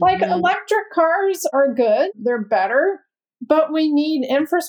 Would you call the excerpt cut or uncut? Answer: uncut